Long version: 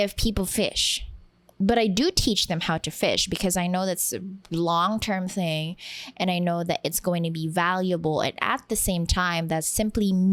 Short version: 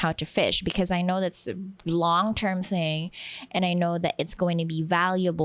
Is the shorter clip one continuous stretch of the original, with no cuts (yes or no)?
yes